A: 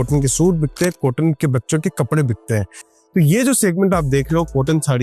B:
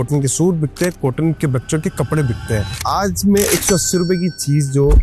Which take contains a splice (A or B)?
B